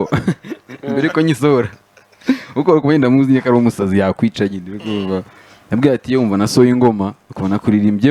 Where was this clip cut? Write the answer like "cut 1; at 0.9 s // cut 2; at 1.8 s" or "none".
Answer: none